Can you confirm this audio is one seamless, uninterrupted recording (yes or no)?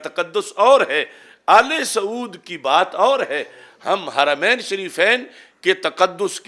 yes